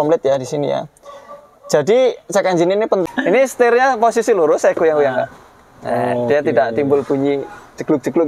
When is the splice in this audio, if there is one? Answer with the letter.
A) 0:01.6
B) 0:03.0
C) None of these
B